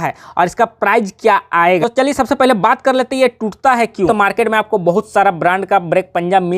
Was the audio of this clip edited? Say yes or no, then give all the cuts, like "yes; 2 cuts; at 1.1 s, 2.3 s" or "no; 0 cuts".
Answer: yes; 2 cuts; at 1.8 s, 4.1 s